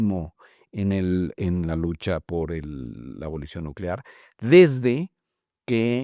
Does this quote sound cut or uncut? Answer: uncut